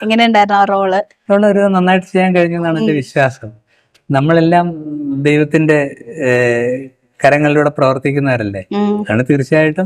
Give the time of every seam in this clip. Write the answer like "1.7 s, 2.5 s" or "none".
1.1 s